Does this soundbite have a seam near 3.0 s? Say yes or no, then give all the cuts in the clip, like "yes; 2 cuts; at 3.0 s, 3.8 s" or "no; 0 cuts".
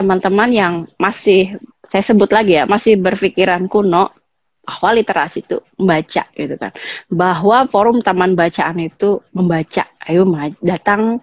no; 1 cut; at 1.6 s